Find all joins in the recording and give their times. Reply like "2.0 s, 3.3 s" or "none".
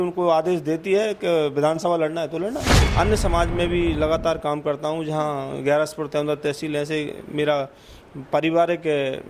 2.8 s